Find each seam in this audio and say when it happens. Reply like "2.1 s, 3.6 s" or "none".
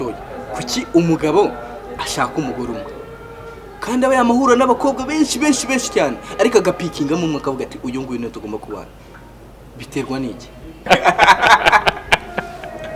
10.9 s